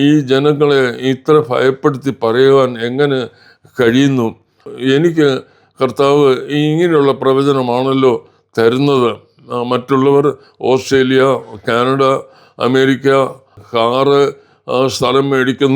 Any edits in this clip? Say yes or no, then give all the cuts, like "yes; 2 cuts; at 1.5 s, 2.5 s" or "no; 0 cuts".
yes; 2 cuts; at 4.6 s, 13.6 s